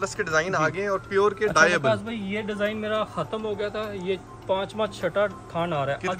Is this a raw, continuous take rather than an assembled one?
yes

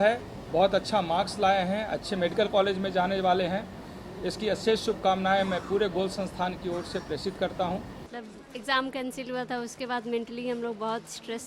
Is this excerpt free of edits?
no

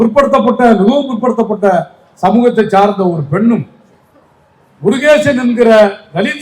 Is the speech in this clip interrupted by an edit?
no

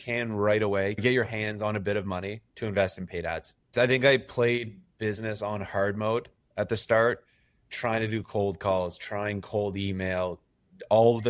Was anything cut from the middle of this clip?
yes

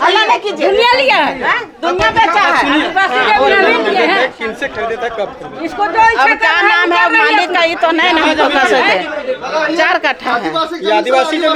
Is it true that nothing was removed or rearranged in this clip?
yes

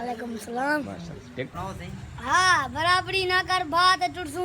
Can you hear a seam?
yes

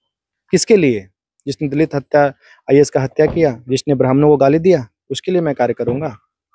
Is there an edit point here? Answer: no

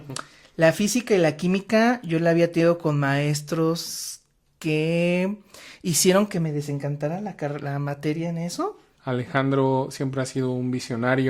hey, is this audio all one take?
no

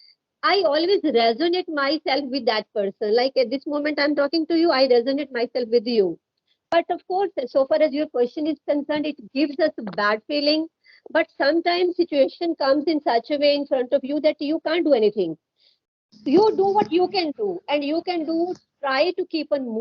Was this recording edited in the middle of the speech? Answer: no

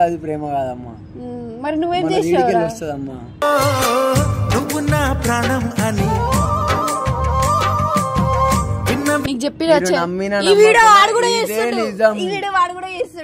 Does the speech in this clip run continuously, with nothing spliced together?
no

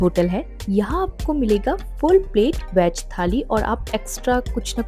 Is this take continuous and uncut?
yes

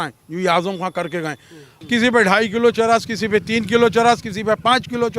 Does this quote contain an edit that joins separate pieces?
yes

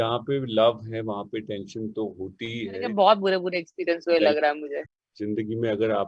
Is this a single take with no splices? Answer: no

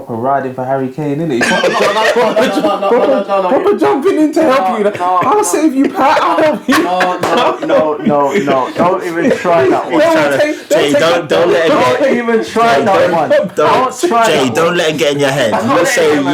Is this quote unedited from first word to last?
yes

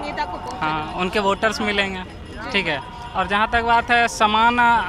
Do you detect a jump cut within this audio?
no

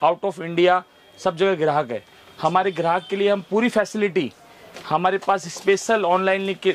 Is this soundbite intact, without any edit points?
yes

